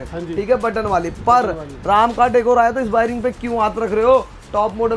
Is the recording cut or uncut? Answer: uncut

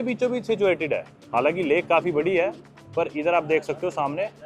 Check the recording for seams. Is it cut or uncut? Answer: uncut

